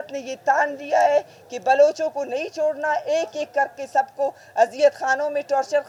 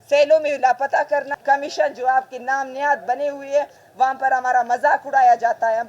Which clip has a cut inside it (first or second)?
second